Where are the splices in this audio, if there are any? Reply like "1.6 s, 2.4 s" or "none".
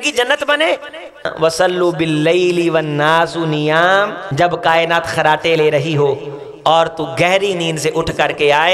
1.3 s, 4.2 s